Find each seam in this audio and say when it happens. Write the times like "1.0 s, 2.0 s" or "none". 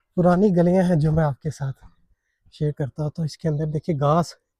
none